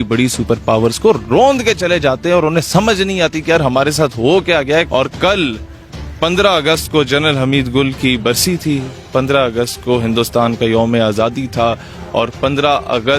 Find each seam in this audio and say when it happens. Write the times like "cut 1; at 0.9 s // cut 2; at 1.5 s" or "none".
cut 1; at 4.9 s